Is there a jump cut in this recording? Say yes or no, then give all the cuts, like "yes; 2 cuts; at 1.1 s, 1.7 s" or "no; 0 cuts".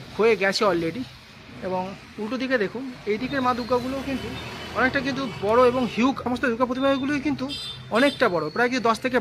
yes; 1 cut; at 6.2 s